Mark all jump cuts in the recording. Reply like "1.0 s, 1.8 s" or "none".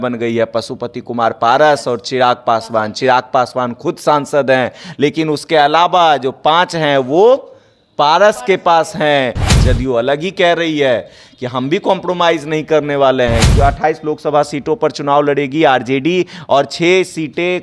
9.5 s, 13.5 s